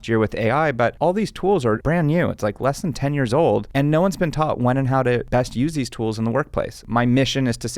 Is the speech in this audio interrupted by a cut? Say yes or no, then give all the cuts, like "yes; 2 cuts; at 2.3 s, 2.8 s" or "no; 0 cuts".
yes; 3 cuts; at 1.8 s, 5.3 s, 6.9 s